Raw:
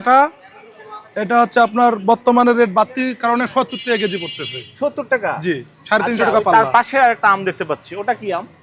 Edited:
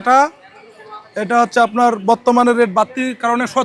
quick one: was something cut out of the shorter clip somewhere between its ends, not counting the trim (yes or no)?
no